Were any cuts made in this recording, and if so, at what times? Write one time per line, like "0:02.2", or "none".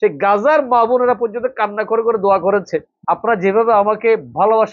0:02.9